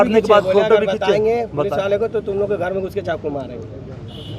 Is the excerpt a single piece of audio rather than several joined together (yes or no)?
yes